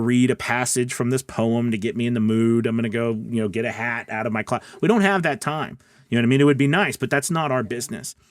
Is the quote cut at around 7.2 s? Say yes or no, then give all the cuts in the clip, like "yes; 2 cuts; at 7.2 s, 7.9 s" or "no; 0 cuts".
yes; 1 cut; at 7.2 s